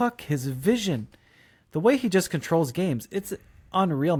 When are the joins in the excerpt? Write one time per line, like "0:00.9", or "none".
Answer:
none